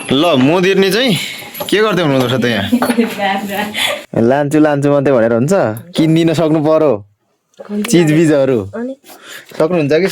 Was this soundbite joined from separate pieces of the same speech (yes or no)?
yes